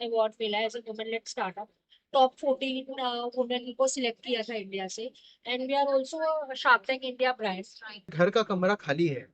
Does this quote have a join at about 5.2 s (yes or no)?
no